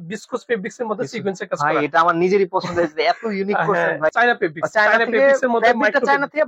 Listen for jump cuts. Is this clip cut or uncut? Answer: cut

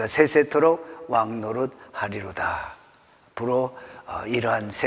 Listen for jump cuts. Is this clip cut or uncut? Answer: uncut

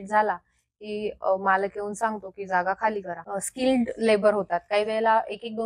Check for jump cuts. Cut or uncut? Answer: cut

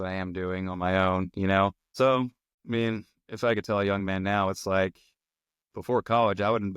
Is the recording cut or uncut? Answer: cut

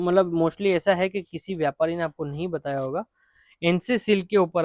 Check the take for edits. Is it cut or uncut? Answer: uncut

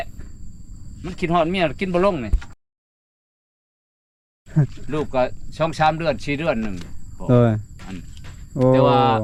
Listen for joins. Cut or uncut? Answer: uncut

